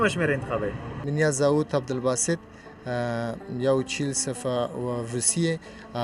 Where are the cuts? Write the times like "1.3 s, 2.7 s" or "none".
0.9 s